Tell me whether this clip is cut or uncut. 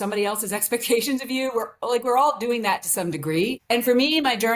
cut